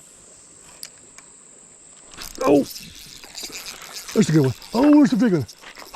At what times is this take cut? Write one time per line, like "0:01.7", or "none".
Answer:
0:01.8